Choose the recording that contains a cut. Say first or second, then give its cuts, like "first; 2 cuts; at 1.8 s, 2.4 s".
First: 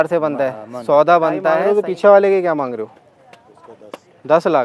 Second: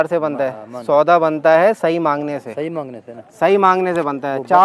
first; 1 cut; at 1.6 s